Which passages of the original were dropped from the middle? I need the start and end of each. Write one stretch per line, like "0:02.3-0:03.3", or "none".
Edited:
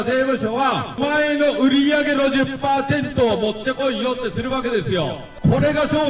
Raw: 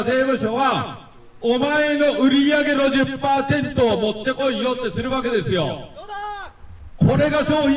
0:01.0-0:01.6
0:05.9-0:06.8